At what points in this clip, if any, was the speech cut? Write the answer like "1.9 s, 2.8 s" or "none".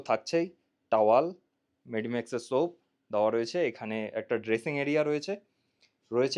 none

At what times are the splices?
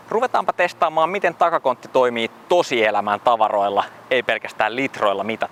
none

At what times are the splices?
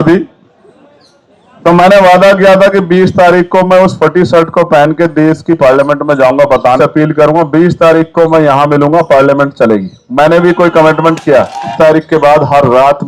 6.8 s, 11.7 s

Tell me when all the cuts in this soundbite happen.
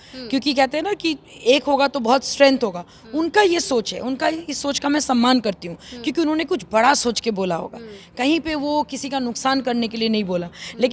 none

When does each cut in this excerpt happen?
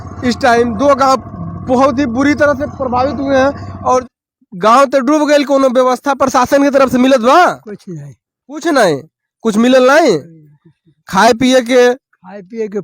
4.1 s

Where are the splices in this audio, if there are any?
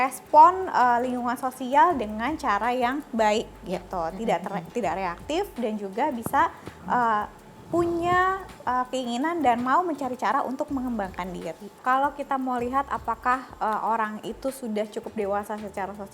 11.8 s

